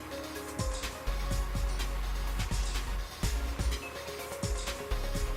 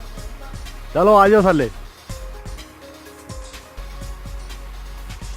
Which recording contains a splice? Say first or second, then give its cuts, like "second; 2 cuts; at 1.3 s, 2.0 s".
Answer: second; 1 cut; at 1.7 s